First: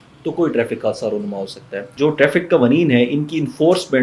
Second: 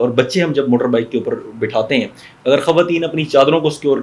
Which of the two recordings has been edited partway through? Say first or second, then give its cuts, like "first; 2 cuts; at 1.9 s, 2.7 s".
first; 1 cut; at 1.9 s